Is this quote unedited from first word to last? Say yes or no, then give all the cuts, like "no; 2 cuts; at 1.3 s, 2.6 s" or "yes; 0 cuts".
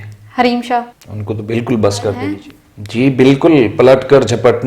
no; 1 cut; at 2.8 s